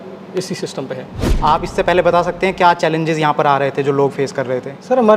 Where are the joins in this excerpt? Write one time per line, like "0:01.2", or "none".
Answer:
none